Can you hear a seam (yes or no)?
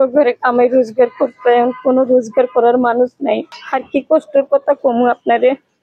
yes